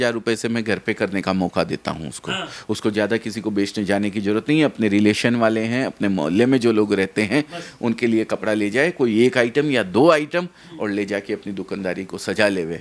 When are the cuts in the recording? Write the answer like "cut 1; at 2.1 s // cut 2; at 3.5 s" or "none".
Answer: none